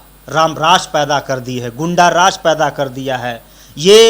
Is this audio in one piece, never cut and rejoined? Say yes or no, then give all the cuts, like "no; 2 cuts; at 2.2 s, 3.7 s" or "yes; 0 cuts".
yes; 0 cuts